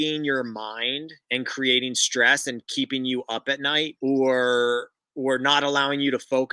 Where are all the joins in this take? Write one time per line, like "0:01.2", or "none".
0:03.9